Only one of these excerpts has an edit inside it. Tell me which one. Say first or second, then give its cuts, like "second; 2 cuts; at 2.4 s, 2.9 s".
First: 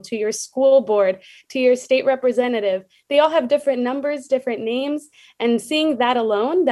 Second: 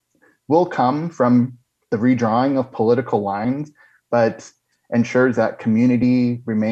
second; 1 cut; at 3.4 s